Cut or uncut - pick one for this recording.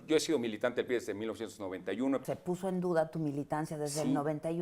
cut